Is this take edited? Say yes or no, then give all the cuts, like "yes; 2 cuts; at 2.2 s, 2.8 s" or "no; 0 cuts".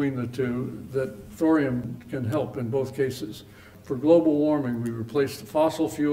yes; 3 cuts; at 1.2 s, 2.0 s, 3.7 s